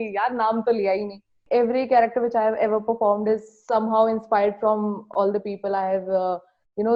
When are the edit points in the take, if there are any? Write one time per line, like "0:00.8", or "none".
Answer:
0:01.3